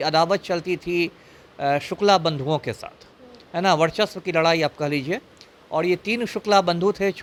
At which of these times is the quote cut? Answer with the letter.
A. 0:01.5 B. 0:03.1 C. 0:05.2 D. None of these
D